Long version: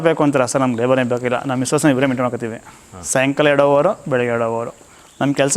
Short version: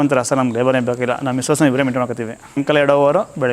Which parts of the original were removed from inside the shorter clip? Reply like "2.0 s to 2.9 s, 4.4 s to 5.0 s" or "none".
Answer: 2.8 s to 3.3 s